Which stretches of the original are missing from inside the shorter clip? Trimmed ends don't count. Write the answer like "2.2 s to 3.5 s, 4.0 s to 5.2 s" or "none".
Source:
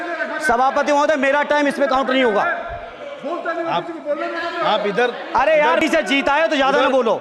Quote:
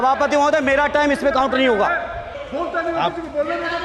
2.9 s to 3.0 s

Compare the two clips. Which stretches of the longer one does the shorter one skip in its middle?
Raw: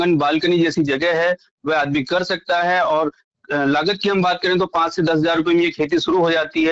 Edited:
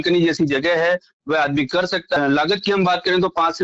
2.5 s to 3.5 s

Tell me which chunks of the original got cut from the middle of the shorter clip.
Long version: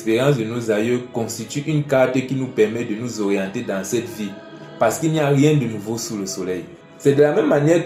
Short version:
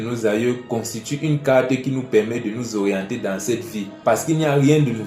4.3 s to 4.6 s

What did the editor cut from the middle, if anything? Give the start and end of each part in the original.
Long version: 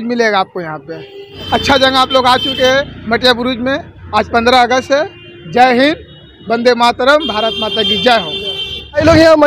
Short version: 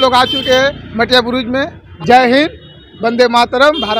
3.9 s to 5.3 s

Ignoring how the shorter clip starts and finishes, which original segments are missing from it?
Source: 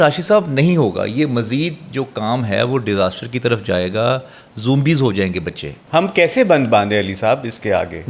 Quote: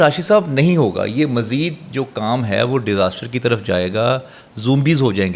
none

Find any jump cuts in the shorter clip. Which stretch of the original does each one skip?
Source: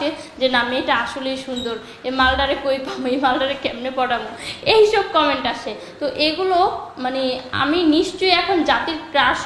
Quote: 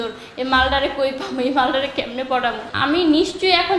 4.4 s to 7.5 s

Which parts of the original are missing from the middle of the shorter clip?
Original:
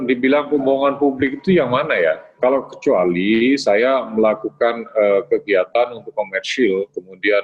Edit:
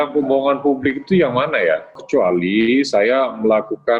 2.3 s to 2.7 s

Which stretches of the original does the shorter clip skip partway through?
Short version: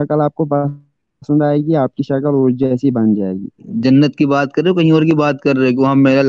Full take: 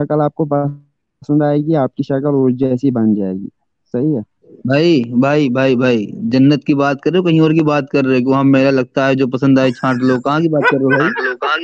3.7 s to 6.1 s

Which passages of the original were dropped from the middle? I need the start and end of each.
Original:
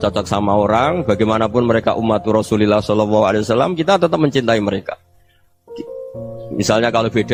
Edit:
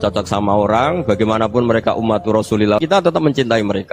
3.0 s to 4.0 s

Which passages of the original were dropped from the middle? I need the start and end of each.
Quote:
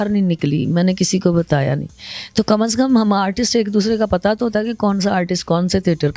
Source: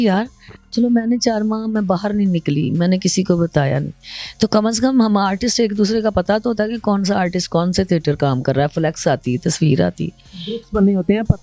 none

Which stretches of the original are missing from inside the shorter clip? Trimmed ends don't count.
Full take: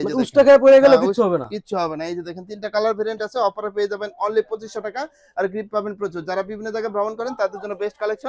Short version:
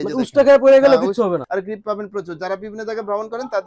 1.4 s to 5.3 s

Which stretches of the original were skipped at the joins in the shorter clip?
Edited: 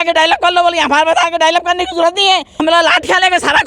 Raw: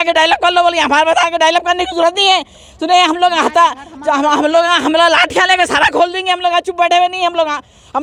2.6 s to 4.8 s

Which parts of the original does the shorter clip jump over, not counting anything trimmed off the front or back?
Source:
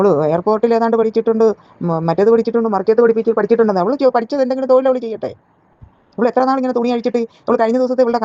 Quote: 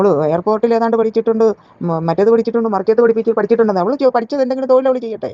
none

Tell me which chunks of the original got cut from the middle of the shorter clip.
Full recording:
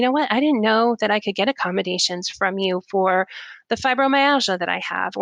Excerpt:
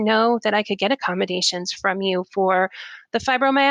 none

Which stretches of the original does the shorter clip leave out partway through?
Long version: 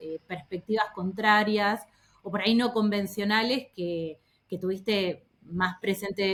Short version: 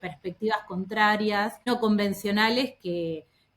2.0 s to 2.6 s

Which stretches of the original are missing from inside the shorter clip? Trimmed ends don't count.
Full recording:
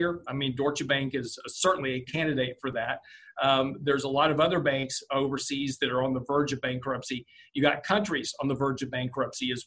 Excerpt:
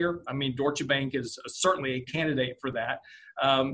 none

